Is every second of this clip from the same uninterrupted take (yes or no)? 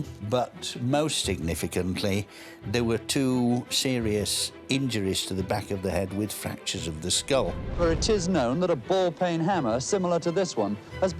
no